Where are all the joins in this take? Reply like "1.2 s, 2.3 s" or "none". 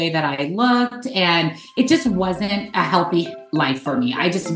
2.7 s

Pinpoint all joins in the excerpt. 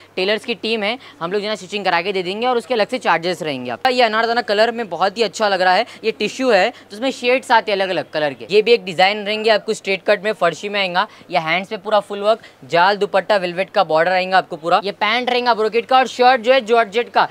3.9 s, 8.4 s, 14.9 s

